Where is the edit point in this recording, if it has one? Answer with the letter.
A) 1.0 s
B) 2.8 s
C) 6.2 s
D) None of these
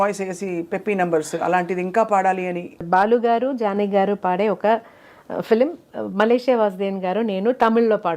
B